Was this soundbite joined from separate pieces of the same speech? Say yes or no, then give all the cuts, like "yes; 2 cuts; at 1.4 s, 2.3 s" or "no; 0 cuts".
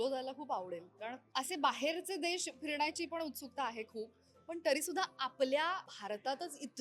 yes; 2 cuts; at 1.2 s, 5.9 s